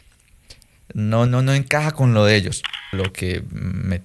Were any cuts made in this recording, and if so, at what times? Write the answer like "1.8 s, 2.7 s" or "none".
2.9 s